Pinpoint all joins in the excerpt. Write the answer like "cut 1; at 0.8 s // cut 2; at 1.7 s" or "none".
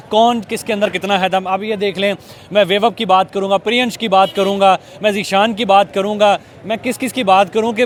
none